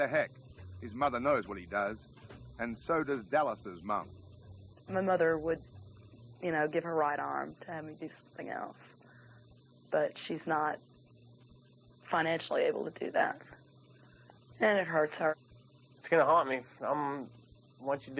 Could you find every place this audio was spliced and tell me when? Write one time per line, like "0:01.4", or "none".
none